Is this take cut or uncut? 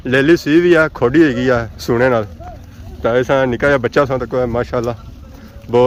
uncut